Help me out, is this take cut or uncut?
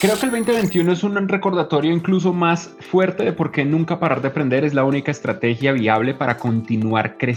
uncut